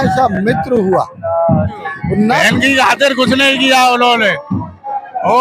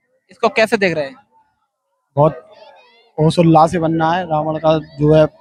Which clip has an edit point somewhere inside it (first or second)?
first